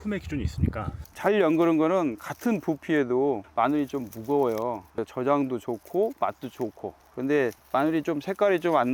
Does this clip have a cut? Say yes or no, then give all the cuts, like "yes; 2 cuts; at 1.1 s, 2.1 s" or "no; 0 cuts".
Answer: yes; 1 cut; at 1.0 s